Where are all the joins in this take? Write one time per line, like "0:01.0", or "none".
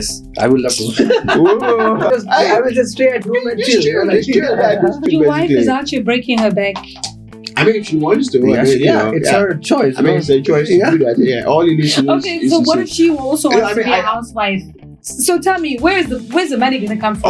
0:02.1
0:05.1